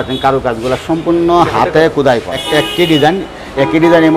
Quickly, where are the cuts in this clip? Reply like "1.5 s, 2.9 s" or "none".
2.4 s